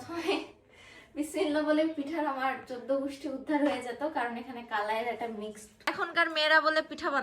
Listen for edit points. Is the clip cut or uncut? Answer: cut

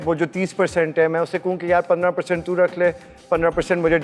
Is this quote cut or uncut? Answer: uncut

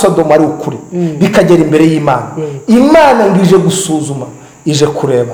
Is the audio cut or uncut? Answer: uncut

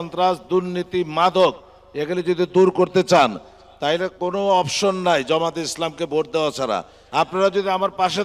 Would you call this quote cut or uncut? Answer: cut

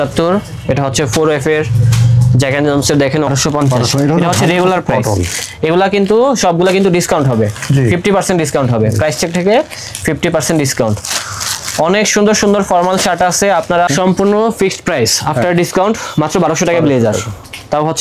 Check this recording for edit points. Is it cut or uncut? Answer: cut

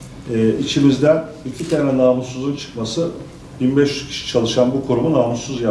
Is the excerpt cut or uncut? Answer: uncut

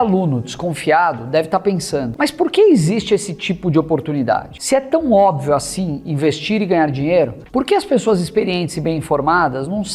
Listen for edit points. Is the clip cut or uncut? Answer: cut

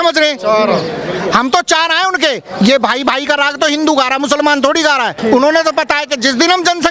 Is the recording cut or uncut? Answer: cut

